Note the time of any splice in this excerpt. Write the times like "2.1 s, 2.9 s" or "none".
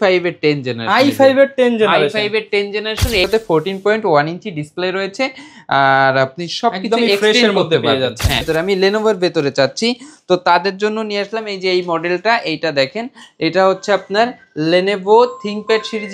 3.2 s, 8.5 s

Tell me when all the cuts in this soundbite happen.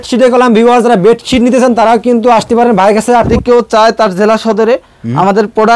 3.3 s

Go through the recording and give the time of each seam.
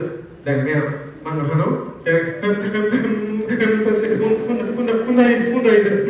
none

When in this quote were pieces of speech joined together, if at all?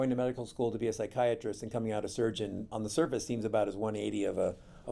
2.6 s

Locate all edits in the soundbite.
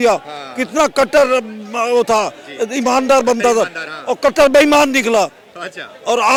none

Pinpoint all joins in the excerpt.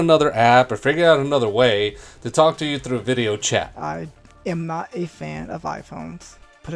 3.7 s

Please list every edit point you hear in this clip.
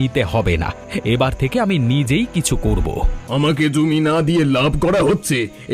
3.2 s

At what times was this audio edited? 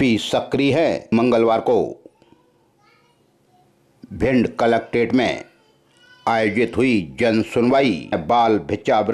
1.1 s, 8.2 s

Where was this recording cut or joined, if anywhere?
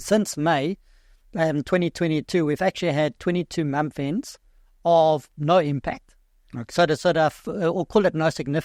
none

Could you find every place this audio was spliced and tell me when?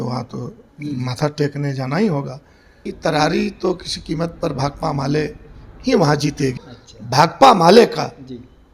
2.9 s, 6.6 s

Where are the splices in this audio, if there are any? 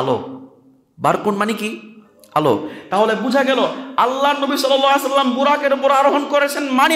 none

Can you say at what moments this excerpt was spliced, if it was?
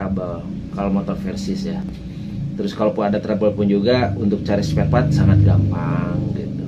none

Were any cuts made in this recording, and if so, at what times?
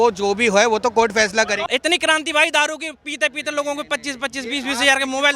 1.6 s

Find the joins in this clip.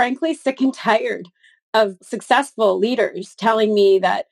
2.0 s

